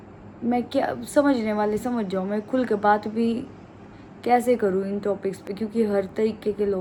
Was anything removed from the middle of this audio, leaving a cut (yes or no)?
no